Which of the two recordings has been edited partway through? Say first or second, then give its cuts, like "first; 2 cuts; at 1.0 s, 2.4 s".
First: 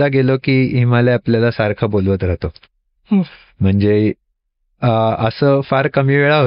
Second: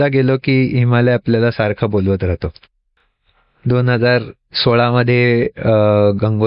second; 1 cut; at 2.9 s